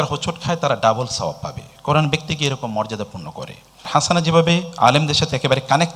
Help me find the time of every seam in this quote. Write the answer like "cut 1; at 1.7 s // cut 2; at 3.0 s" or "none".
cut 1; at 3.9 s